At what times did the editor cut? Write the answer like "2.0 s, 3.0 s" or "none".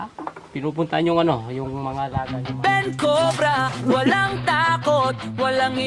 2.2 s